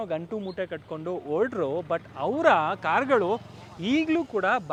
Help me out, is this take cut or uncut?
uncut